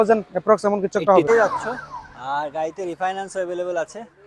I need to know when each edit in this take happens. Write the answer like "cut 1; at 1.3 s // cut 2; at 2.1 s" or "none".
cut 1; at 1.3 s